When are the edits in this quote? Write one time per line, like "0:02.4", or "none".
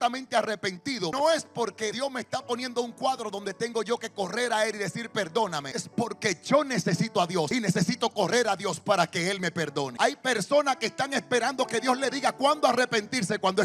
0:01.1
0:01.9
0:05.7
0:07.5
0:09.9